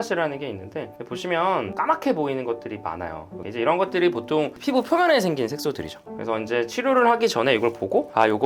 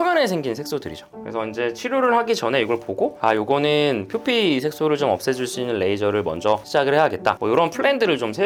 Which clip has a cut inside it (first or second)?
first